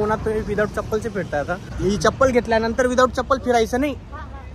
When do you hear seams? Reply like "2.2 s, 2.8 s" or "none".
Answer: 1.7 s